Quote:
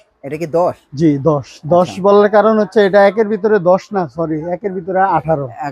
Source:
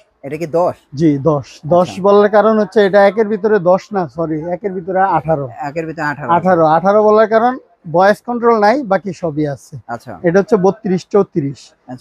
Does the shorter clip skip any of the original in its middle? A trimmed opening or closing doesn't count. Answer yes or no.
no